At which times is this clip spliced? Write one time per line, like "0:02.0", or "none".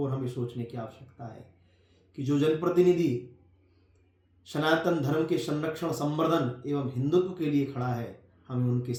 none